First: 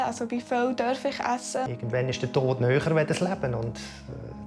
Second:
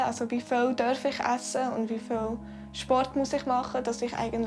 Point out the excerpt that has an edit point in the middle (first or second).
first